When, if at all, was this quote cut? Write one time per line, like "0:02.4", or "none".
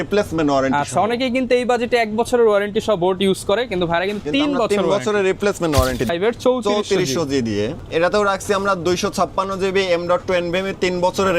0:06.1
0:07.8